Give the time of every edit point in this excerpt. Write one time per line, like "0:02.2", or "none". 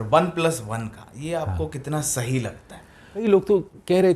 0:03.2